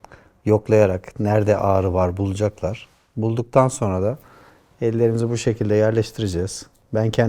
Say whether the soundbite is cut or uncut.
uncut